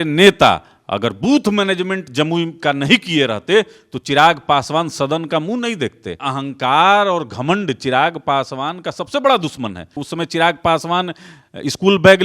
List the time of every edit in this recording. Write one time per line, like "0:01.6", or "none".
0:06.2
0:10.0